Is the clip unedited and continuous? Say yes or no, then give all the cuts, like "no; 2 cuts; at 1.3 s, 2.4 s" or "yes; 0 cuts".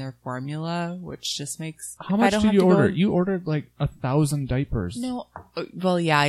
no; 1 cut; at 1.9 s